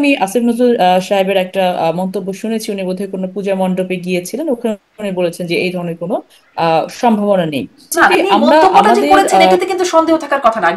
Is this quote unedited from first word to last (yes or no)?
no